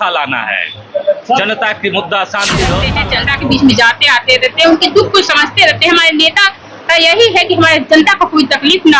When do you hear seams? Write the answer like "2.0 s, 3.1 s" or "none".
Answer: 2.9 s